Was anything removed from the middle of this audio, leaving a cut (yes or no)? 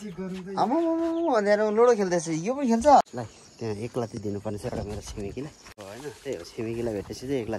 yes